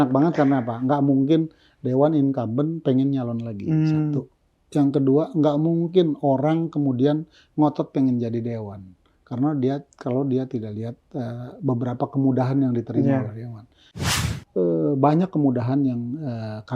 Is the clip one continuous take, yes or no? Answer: no